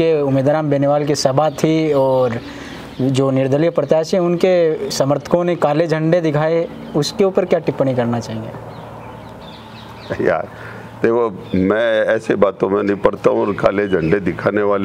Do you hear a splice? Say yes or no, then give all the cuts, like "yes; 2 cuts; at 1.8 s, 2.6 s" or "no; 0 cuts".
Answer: no; 0 cuts